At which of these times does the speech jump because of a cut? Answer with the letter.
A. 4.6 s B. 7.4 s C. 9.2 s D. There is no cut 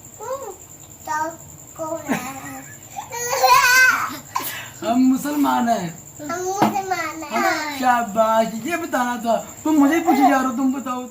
B